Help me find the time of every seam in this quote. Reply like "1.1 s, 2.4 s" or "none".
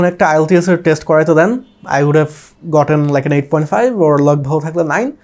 none